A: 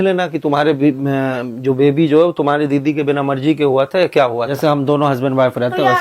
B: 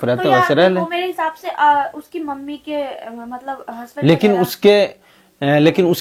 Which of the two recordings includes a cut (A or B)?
A